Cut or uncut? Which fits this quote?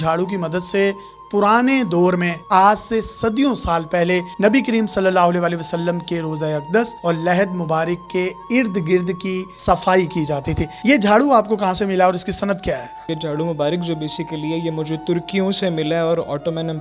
uncut